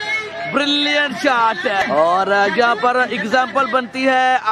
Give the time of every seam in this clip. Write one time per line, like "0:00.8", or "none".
0:01.8